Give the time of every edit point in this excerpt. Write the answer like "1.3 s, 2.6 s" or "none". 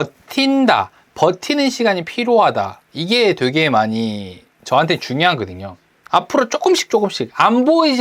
6.0 s